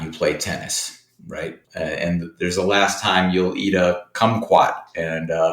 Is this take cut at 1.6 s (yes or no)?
yes